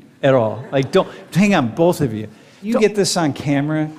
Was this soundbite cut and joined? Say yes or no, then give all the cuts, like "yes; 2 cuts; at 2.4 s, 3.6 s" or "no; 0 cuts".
yes; 1 cut; at 2.7 s